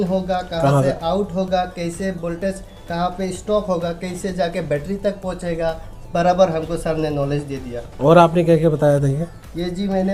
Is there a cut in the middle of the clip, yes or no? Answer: no